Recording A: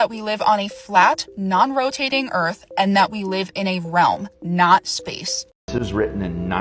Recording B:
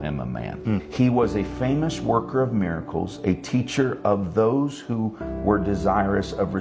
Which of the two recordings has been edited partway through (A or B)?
A